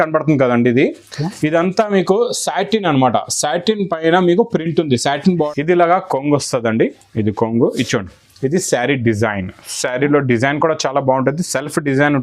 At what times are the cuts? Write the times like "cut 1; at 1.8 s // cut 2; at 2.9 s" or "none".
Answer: cut 1; at 5.3 s